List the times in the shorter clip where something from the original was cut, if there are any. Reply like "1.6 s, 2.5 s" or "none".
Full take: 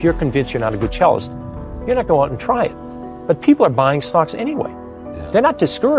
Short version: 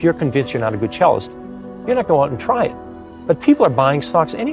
none